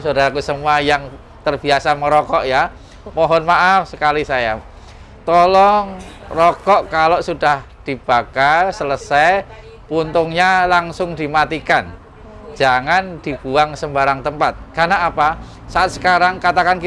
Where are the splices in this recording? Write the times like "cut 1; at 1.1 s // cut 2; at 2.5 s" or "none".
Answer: none

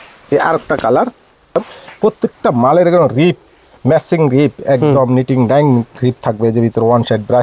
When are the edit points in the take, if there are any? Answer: cut 1; at 1.6 s

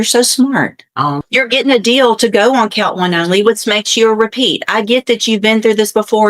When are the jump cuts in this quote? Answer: cut 1; at 1.2 s

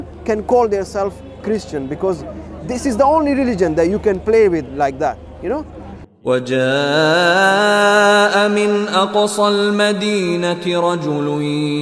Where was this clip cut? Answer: cut 1; at 6.1 s

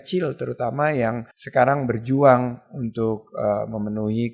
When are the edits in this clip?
cut 1; at 1.3 s

